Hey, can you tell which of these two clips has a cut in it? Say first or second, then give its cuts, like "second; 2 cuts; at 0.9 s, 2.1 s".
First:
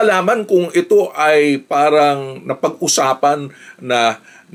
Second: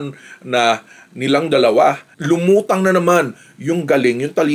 second; 1 cut; at 2.1 s